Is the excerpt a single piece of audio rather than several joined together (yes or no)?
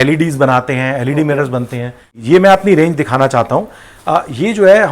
no